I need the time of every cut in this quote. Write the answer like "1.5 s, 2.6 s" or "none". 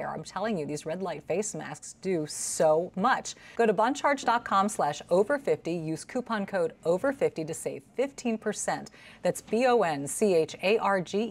3.4 s